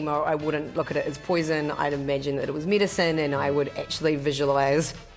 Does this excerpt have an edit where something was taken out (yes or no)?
no